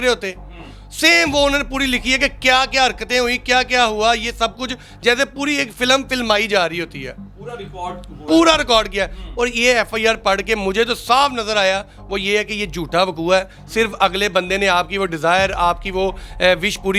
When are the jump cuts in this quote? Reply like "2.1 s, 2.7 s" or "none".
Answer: none